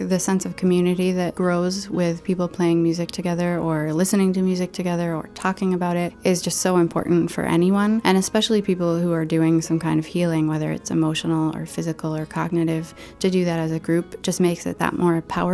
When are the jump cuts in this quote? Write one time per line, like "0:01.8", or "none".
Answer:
0:01.3
0:06.1
0:08.0